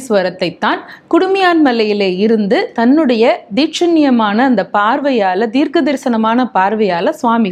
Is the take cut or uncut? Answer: uncut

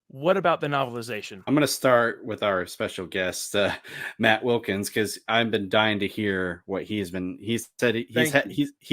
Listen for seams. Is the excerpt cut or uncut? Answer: cut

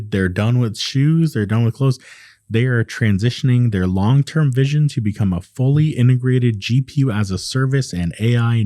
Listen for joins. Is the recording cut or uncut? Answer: uncut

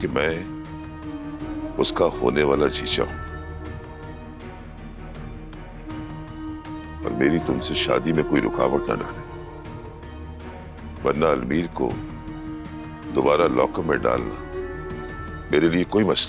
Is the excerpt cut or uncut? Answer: uncut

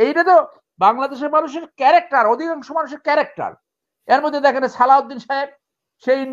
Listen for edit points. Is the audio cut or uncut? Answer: uncut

